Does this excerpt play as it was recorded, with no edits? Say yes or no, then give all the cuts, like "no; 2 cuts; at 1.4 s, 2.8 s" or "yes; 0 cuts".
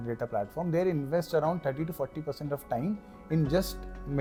yes; 0 cuts